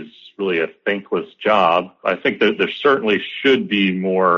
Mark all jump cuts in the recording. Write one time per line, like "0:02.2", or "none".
0:01.9